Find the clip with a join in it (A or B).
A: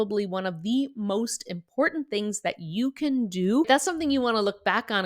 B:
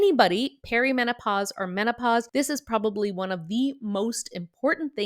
A